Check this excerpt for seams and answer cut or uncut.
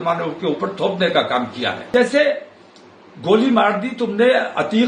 cut